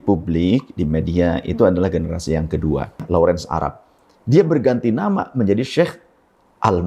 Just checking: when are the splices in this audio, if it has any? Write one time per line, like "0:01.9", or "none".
0:03.0